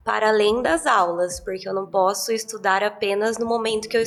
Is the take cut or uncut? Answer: uncut